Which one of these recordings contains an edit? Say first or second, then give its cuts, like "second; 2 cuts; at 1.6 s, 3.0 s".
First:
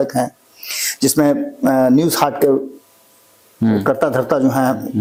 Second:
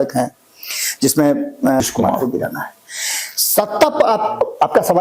second; 1 cut; at 1.8 s